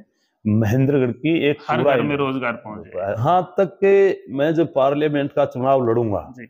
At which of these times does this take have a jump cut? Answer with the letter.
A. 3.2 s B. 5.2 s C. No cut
A